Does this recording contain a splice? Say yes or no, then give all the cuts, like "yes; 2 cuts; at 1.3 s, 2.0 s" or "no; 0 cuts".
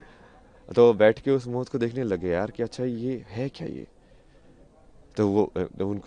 no; 0 cuts